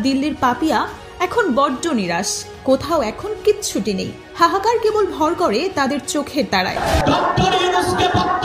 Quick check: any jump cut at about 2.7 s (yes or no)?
no